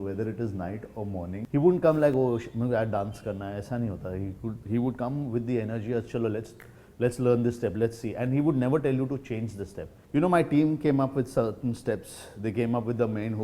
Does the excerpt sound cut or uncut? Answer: cut